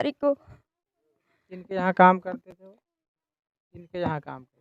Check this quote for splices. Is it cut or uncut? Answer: uncut